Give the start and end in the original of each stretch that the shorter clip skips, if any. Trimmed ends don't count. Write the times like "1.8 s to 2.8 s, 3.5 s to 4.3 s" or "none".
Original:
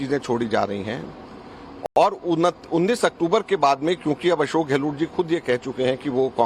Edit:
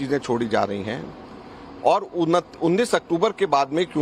1.8 s to 1.9 s